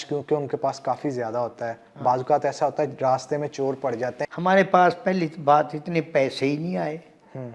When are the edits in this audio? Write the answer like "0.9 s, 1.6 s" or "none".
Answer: 4.3 s